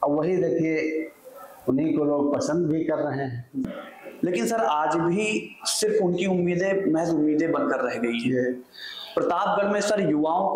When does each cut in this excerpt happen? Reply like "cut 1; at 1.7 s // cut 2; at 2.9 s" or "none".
cut 1; at 3.6 s